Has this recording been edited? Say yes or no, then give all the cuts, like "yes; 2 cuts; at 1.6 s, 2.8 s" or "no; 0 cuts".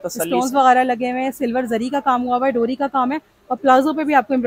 no; 0 cuts